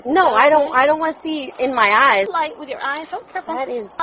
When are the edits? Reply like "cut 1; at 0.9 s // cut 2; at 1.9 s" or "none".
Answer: cut 1; at 2.3 s